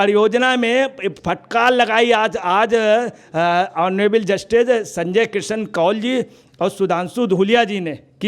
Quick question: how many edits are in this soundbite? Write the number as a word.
zero